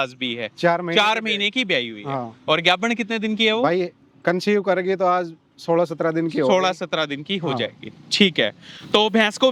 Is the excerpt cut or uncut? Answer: uncut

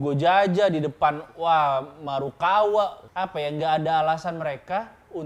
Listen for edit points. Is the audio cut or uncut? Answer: cut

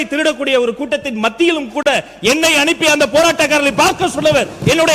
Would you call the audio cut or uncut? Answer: uncut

